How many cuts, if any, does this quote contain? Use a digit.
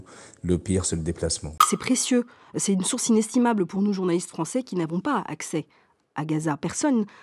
1